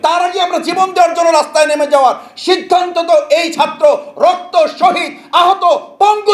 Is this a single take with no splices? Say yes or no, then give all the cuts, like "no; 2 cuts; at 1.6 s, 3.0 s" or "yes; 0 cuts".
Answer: yes; 0 cuts